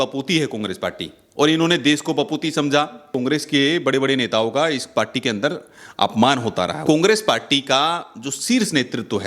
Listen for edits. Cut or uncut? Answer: cut